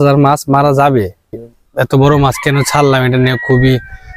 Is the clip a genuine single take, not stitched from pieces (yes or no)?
no